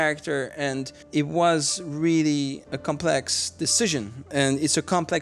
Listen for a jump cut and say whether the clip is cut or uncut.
cut